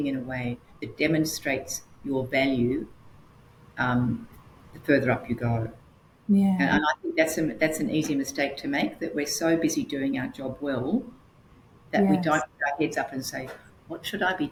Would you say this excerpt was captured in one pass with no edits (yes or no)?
yes